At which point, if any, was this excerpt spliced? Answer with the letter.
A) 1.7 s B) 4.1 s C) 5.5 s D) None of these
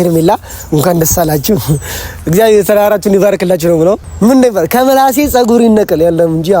B